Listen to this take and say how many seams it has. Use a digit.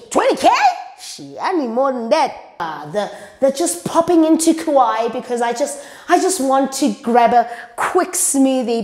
1